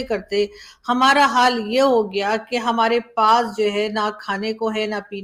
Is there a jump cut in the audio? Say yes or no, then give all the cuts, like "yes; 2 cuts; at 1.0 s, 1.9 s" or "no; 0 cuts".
no; 0 cuts